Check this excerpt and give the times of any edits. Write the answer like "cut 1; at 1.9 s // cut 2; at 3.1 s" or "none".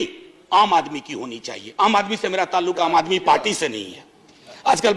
none